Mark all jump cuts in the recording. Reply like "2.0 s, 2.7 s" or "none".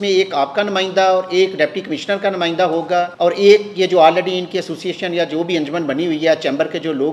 3.1 s